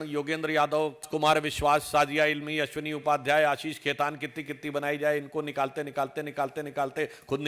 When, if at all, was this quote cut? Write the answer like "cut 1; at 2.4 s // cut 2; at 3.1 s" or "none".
cut 1; at 1.1 s

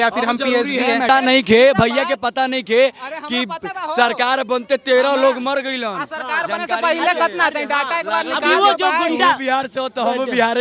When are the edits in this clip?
cut 1; at 1.1 s

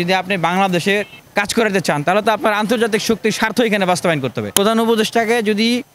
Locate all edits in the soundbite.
cut 1; at 1.2 s // cut 2; at 4.4 s

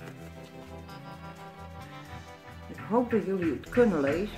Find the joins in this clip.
cut 1; at 2.8 s

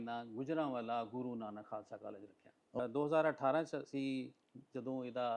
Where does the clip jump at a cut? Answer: cut 1; at 2.8 s

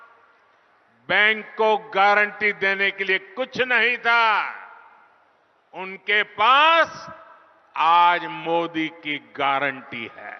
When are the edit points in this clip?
none

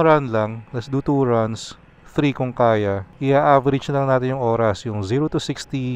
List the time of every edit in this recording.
cut 1; at 3.1 s

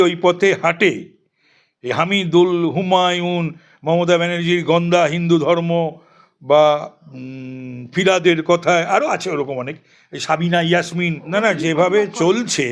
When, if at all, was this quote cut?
cut 1; at 11.3 s

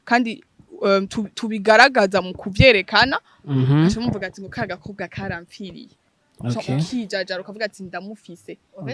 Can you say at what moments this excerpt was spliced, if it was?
none

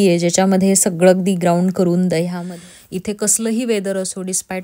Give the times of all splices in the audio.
cut 1; at 2.3 s

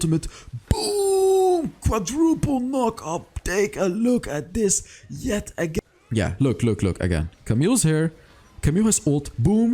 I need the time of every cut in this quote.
cut 1; at 5.8 s

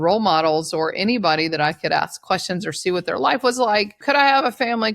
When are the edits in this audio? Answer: cut 1; at 4.0 s

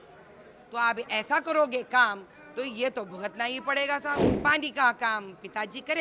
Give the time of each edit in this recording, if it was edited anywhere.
cut 1; at 4.3 s

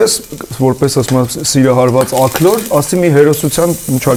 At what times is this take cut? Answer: none

